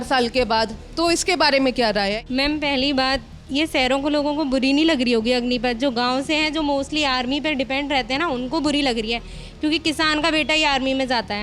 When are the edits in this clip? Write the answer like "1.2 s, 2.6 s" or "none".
2.2 s